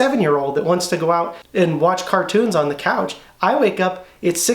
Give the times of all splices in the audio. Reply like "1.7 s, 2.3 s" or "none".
1.4 s